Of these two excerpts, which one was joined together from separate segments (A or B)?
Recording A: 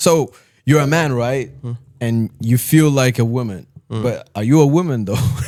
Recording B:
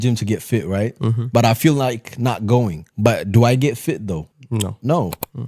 B